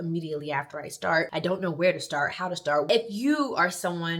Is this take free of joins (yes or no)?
no